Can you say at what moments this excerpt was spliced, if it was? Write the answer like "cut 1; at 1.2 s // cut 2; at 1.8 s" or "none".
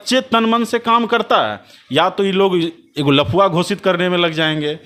none